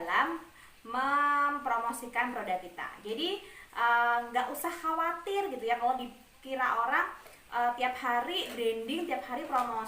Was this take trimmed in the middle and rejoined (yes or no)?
no